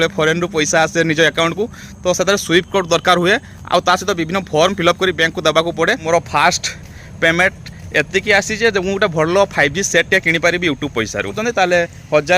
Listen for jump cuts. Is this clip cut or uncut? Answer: cut